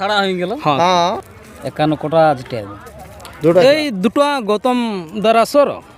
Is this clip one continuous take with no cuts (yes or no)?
no